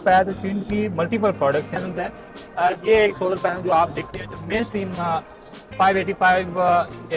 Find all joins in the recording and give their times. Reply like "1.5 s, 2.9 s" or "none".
1.8 s